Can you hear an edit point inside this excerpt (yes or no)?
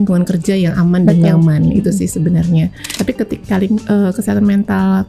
yes